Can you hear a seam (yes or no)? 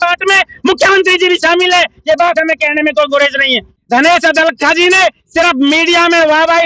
yes